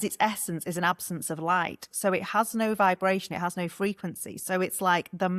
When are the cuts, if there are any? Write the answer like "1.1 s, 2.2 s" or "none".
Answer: none